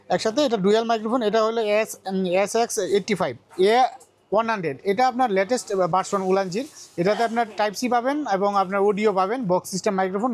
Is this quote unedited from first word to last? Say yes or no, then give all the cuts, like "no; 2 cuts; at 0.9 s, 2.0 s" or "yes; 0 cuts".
no; 1 cut; at 3.5 s